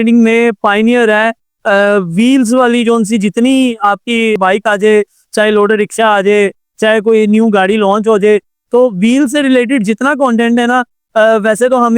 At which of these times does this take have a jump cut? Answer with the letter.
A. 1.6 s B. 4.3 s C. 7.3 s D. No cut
B